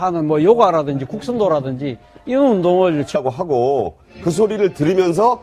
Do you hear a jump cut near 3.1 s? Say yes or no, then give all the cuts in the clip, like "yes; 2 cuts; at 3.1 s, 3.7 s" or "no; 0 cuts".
no; 0 cuts